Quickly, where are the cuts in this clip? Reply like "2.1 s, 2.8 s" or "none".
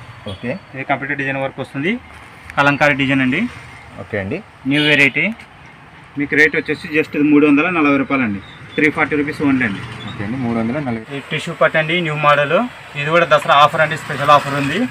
11.0 s